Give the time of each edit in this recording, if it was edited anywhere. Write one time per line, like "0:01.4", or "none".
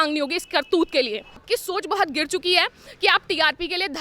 0:01.4